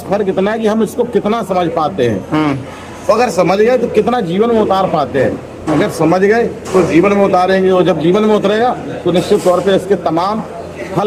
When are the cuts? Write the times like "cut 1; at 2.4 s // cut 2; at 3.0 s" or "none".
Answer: none